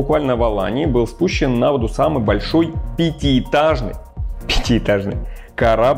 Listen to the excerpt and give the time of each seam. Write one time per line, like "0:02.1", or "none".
none